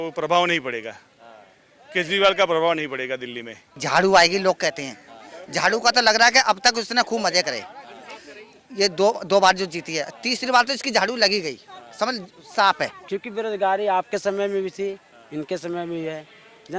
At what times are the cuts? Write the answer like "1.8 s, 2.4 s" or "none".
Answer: 3.7 s, 13.0 s